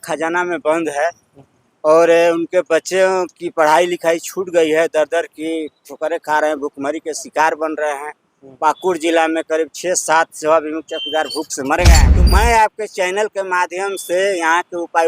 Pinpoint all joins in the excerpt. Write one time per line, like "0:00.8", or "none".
0:12.1